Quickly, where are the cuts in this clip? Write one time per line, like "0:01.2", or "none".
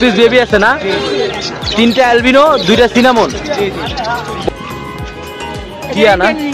0:04.5